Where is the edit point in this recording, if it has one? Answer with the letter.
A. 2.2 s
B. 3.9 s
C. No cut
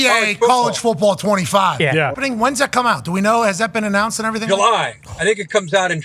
A